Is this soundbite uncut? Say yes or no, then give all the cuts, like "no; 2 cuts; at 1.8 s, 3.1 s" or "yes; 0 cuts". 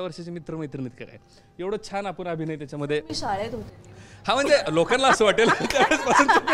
yes; 0 cuts